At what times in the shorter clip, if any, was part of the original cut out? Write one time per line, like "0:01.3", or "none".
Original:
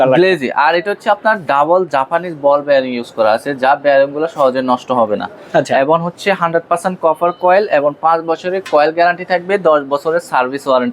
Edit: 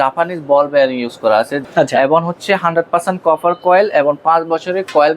0:01.6